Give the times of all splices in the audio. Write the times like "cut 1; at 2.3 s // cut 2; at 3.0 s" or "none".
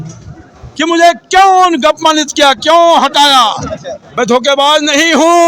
cut 1; at 4.0 s